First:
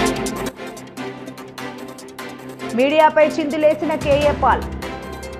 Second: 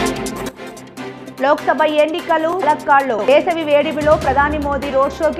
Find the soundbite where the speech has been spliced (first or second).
second